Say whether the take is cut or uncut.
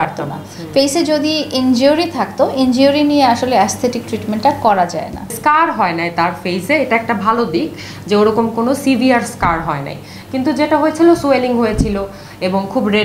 cut